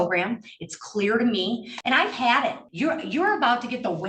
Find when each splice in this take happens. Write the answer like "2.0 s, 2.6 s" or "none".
1.7 s, 2.6 s